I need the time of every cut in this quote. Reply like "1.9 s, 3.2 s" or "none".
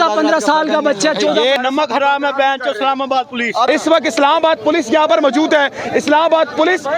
1.6 s, 3.7 s